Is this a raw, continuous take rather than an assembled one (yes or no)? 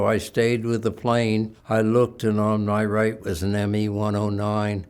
no